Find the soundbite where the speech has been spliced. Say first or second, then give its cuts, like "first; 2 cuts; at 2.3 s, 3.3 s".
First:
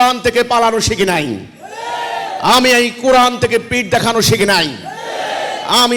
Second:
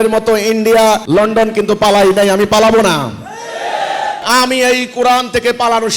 second; 2 cuts; at 1.0 s, 4.2 s